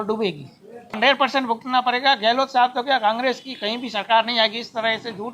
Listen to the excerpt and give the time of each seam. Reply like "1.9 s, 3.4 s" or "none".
1.0 s